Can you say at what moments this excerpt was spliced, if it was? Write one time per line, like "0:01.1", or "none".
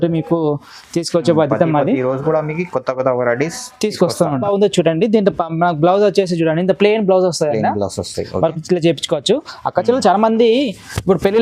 0:04.4